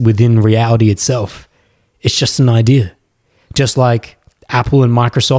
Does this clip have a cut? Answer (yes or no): no